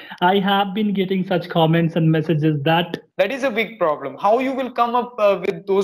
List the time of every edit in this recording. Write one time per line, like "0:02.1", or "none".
0:03.0